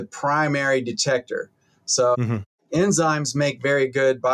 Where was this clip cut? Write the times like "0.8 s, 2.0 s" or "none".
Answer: none